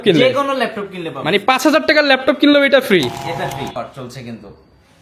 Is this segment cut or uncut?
cut